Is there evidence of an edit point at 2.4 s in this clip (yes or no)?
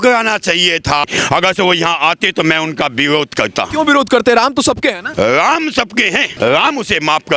no